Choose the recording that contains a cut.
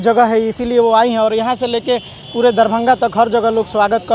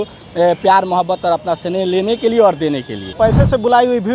second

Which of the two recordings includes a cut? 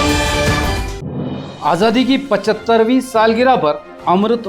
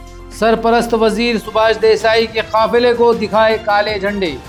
first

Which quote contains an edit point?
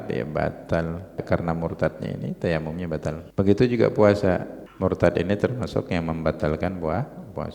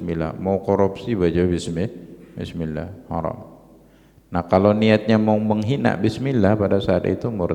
first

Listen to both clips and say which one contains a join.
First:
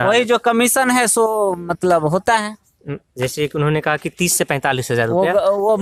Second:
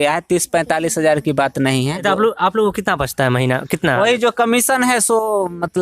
second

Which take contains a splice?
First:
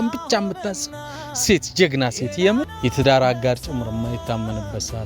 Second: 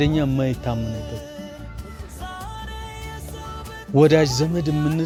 first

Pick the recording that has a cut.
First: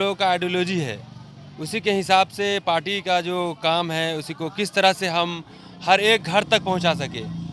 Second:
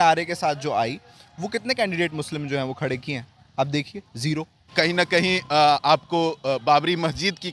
second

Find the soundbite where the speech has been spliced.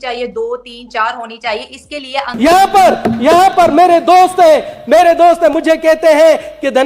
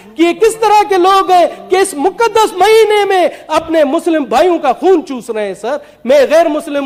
first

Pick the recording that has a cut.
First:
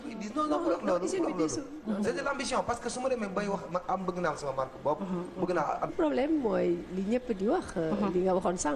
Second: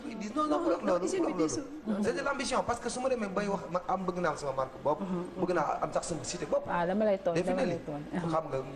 second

